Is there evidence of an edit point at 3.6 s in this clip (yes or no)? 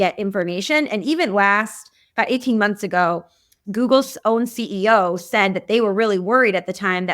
yes